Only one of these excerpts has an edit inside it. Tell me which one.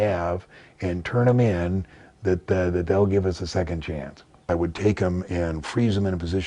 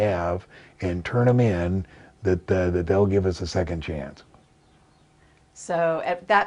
first; 1 cut; at 4.3 s

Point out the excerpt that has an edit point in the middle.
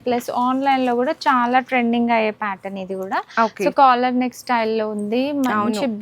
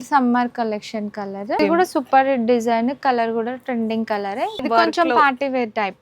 second; 2 cuts; at 1.6 s, 4.6 s

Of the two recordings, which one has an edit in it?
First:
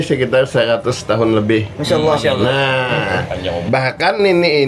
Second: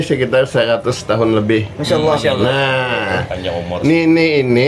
first; 1 cut; at 3.6 s

